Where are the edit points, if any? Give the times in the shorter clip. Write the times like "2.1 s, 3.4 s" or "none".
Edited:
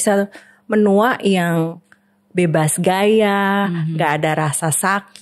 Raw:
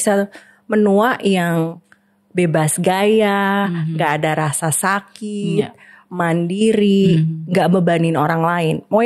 none